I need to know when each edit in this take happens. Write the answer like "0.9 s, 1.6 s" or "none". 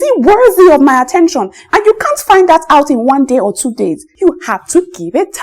4.1 s